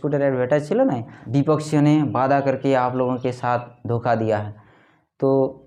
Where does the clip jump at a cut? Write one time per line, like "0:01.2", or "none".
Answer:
0:01.1

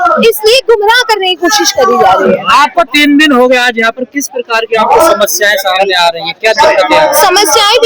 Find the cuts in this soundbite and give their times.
none

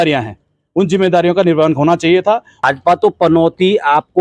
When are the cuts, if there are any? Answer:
0:02.5

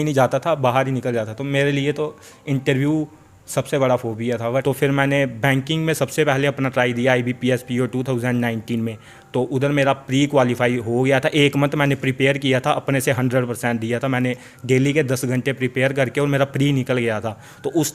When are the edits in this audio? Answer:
0:04.6

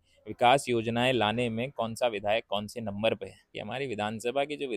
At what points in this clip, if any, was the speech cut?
0:03.6

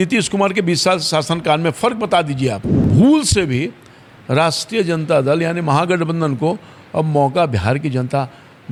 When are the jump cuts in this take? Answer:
none

